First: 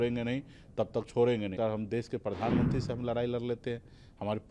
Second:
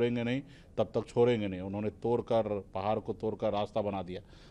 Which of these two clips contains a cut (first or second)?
first